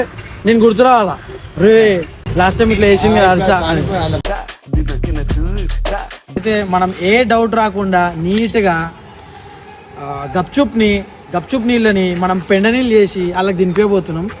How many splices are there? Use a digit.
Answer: 1